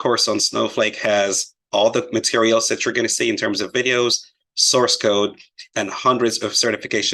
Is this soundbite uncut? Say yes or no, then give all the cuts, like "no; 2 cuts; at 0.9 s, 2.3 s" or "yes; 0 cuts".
no; 1 cut; at 2.5 s